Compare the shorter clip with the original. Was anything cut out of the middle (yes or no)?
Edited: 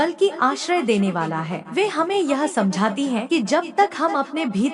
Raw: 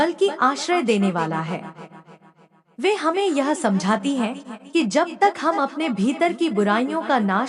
yes